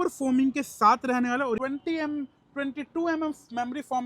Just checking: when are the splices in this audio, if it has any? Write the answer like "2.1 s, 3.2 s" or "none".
1.6 s